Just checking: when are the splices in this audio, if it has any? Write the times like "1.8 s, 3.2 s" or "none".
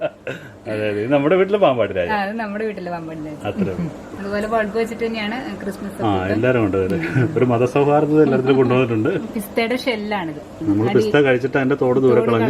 4.1 s, 9.3 s, 10.6 s